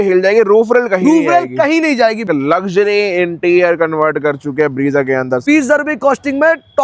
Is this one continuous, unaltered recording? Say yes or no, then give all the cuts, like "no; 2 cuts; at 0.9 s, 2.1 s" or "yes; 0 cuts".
no; 2 cuts; at 2.3 s, 5.4 s